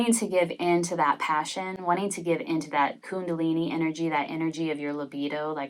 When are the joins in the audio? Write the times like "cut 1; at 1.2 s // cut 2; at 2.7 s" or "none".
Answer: none